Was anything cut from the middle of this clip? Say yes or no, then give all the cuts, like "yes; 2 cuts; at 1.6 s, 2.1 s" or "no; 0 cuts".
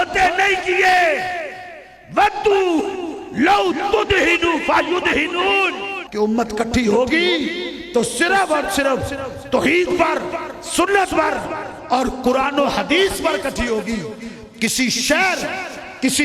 yes; 1 cut; at 6.0 s